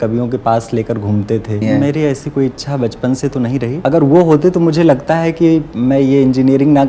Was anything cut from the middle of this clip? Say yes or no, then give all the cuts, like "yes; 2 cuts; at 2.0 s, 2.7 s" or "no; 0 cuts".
yes; 2 cuts; at 1.6 s, 3.8 s